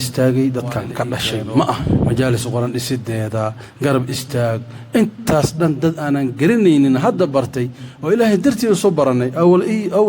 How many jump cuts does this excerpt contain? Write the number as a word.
one